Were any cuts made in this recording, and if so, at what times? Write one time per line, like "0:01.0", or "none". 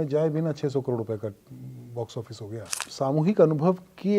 0:02.8